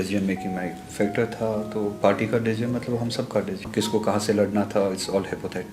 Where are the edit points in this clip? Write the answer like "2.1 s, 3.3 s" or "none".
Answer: 3.7 s